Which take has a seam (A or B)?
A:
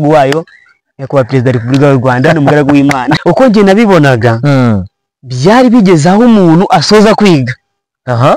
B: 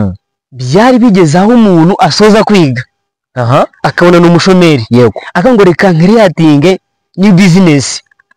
A